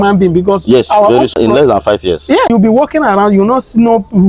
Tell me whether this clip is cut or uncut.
cut